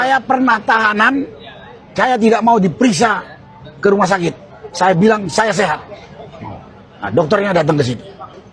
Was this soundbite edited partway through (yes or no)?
no